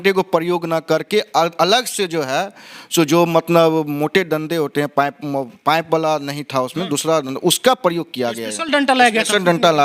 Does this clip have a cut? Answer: no; 0 cuts

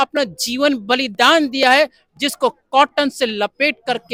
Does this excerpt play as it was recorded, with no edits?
yes; 0 cuts

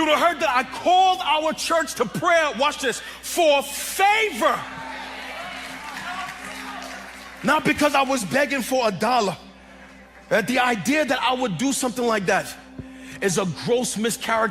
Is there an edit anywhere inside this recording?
no; 0 cuts

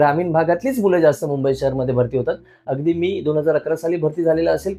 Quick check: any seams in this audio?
no; 0 cuts

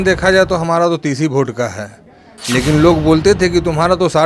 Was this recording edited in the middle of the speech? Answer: no; 0 cuts

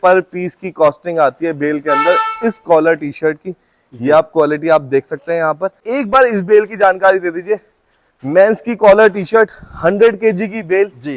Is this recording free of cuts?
yes; 0 cuts

